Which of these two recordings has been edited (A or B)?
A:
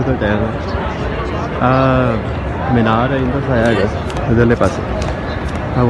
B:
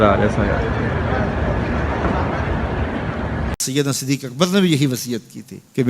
B